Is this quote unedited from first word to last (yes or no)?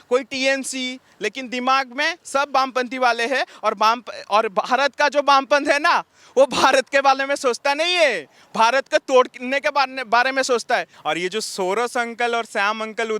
no